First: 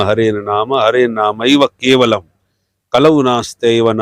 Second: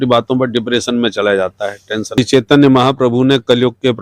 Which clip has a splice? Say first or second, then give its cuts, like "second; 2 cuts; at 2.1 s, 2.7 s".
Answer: second; 1 cut; at 2.2 s